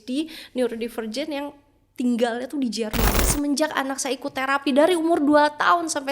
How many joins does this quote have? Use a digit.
1